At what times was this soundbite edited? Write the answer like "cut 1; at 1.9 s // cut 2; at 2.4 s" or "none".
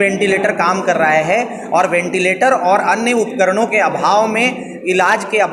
none